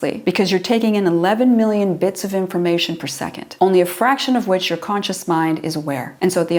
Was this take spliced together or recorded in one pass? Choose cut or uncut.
uncut